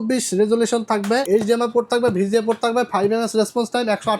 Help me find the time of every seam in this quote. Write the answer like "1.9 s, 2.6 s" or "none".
1.2 s